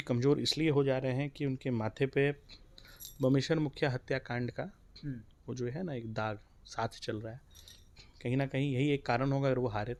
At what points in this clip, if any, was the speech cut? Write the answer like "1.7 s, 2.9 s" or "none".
none